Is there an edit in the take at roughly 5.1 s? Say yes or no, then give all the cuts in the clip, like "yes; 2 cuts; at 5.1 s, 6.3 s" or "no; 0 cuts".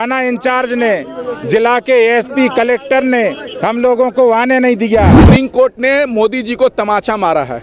yes; 1 cut; at 5.1 s